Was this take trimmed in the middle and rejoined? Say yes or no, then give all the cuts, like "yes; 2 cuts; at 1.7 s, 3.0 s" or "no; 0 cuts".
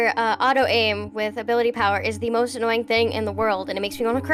no; 0 cuts